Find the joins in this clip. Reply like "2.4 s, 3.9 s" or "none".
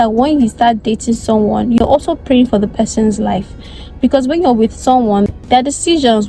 1.8 s, 5.3 s